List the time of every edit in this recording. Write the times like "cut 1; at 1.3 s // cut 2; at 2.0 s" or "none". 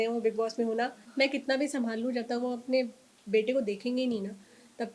cut 1; at 1.0 s

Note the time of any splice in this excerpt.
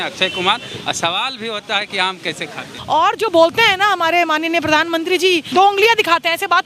cut 1; at 2.7 s // cut 2; at 5.5 s

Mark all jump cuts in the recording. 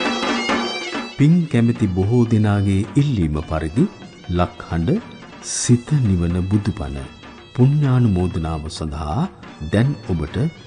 cut 1; at 1.0 s

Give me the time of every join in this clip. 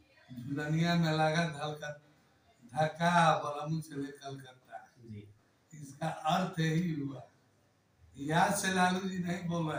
none

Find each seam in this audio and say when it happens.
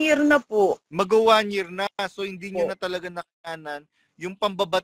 none

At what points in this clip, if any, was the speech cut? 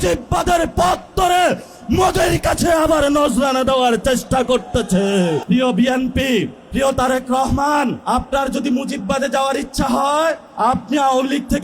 cut 1; at 5.4 s // cut 2; at 6.6 s // cut 3; at 8.0 s // cut 4; at 10.5 s

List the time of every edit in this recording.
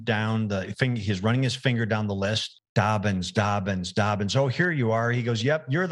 cut 1; at 2.5 s

